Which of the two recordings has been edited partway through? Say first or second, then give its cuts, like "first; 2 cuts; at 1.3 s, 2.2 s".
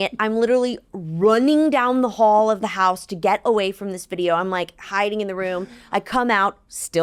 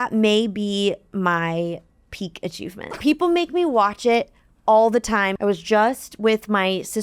second; 2 cuts; at 2.9 s, 5.3 s